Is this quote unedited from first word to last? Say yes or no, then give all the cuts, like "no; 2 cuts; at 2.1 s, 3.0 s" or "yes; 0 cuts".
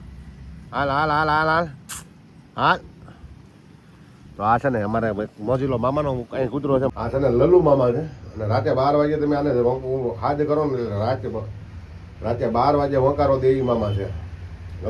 no; 1 cut; at 6.9 s